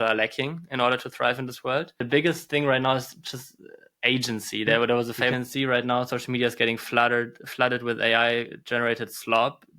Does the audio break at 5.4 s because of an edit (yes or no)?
yes